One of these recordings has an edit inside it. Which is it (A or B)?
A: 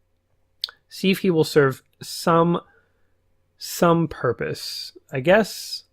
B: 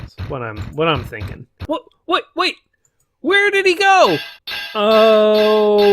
B